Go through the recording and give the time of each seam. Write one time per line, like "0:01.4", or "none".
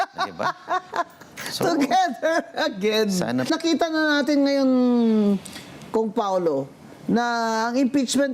0:03.5

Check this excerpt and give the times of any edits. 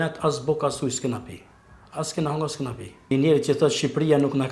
0:03.1

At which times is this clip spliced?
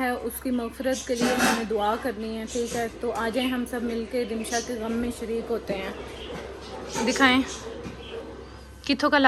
none

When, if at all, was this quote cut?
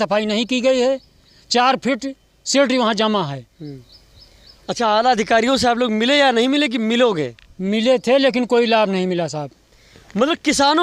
none

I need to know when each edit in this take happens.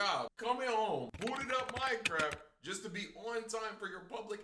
0:01.1

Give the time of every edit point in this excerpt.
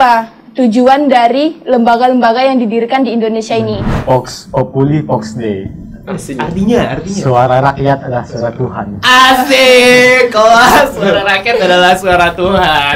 0:03.9

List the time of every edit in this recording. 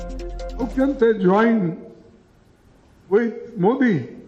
none

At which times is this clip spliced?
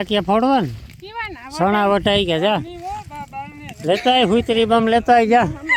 none

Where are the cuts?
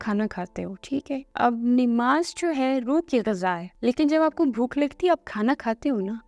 0:01.3
0:03.7

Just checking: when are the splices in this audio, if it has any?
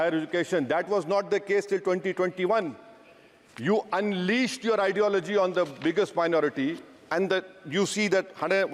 none

